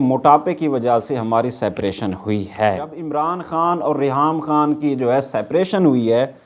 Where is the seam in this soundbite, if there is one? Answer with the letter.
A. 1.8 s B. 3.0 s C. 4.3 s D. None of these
B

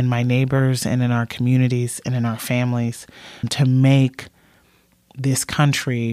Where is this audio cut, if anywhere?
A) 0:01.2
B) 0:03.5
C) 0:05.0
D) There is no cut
B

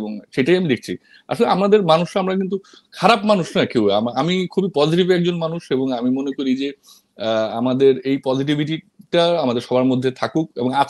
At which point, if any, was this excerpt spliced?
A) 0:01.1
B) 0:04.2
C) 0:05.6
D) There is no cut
D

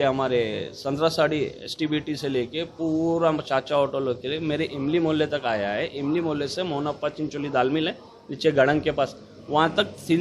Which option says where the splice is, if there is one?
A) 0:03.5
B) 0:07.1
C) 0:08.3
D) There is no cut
D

